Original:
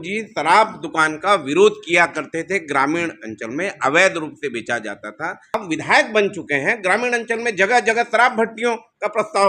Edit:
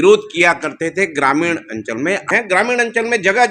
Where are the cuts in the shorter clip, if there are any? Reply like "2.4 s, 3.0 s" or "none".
2.3 s